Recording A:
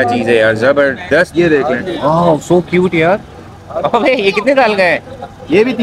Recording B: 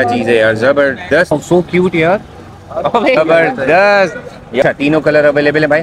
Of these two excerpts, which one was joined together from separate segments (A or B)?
B